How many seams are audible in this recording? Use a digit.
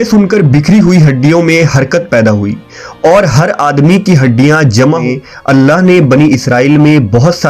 1